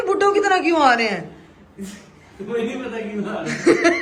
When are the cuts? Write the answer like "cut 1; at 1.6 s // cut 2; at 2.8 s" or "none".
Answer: none